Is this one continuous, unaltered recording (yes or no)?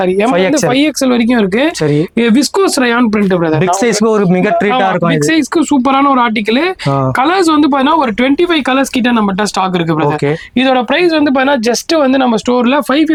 yes